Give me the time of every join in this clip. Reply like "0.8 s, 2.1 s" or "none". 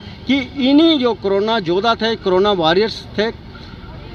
none